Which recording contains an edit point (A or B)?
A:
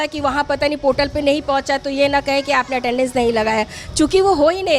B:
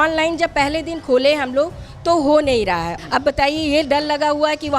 B